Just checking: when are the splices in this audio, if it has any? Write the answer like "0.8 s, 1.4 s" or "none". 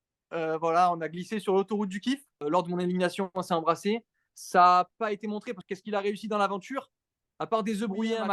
2.3 s, 5.6 s